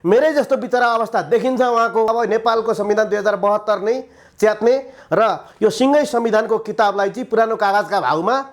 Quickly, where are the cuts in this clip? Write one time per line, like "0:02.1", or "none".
0:02.1